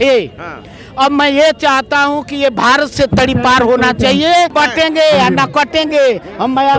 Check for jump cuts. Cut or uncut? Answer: cut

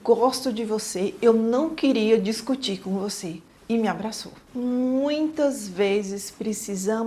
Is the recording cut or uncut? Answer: uncut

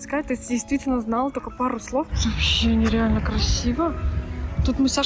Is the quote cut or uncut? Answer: cut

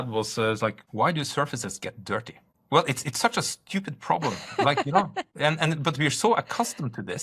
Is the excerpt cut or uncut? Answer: uncut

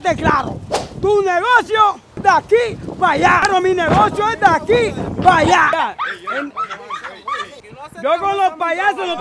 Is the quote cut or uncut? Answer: cut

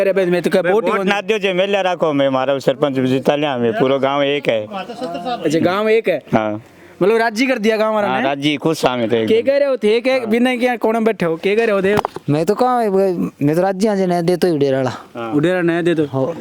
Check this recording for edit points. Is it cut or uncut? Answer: uncut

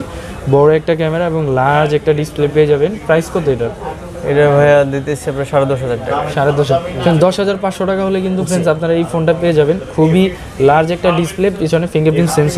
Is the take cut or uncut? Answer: uncut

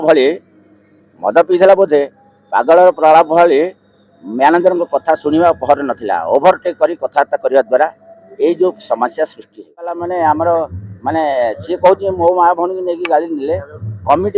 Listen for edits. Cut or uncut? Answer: cut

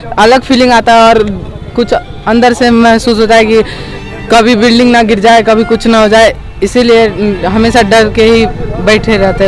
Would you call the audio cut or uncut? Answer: uncut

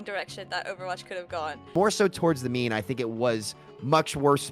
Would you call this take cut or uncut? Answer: cut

